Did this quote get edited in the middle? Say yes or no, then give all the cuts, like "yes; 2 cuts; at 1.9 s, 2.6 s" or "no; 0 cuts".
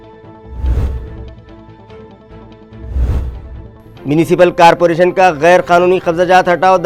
no; 0 cuts